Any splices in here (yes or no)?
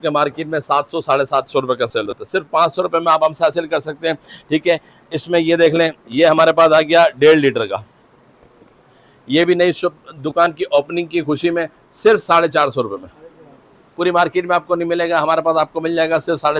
no